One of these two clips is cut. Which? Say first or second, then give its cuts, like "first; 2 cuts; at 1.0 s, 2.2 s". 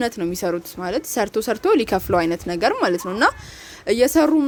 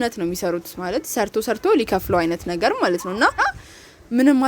second; 1 cut; at 3.4 s